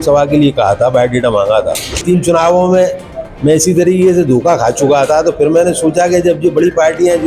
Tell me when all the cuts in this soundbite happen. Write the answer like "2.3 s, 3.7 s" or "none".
2.0 s